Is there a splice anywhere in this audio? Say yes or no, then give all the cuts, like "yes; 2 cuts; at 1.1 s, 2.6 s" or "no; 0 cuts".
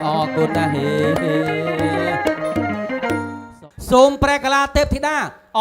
yes; 1 cut; at 3.5 s